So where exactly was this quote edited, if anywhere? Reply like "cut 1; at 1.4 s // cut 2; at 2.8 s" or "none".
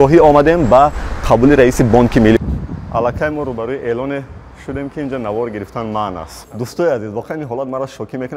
cut 1; at 2.4 s // cut 2; at 6.4 s